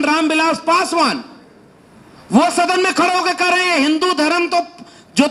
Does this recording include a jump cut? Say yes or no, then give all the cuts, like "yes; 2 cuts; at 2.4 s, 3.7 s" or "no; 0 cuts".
no; 0 cuts